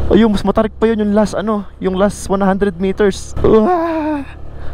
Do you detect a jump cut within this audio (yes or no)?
yes